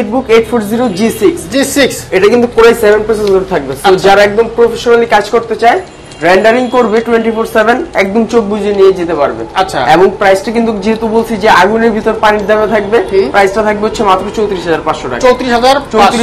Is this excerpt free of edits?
yes; 0 cuts

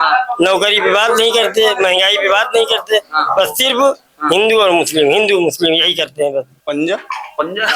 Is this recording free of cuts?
no; 1 cut; at 6.5 s

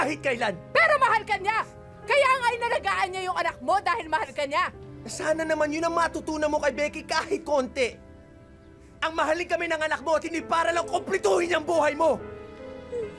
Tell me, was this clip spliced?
no; 0 cuts

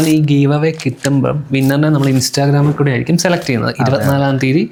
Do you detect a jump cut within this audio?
no; 0 cuts

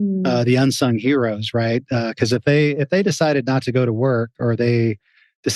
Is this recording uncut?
yes; 0 cuts

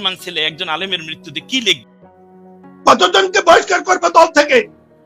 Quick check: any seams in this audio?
yes; 1 cut; at 2.1 s

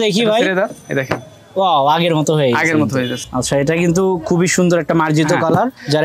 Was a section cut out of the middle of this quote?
yes; 1 cut; at 3.2 s

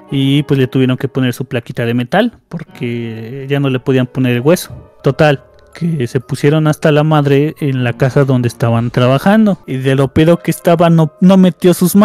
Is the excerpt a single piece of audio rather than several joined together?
no; 2 cuts; at 4.9 s, 9.7 s

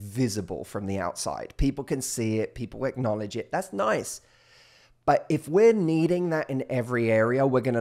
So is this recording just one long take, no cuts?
yes; 0 cuts

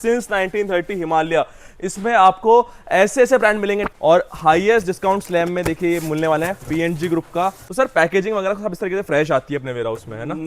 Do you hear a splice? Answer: yes; 2 cuts; at 3.9 s, 7.6 s

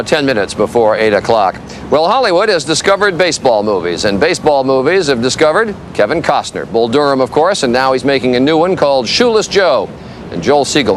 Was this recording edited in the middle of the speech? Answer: no; 0 cuts

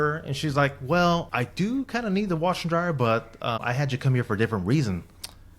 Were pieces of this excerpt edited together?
yes; 1 cut; at 1.3 s

